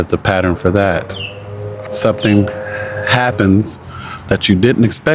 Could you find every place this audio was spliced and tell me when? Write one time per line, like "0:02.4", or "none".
0:01.8